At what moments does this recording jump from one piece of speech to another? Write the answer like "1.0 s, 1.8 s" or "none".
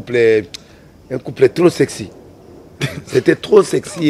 none